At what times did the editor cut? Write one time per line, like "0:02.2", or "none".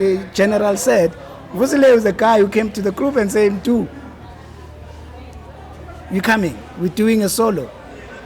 none